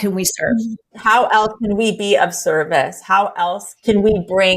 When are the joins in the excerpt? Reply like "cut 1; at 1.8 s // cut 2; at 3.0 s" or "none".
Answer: cut 1; at 0.9 s // cut 2; at 3.7 s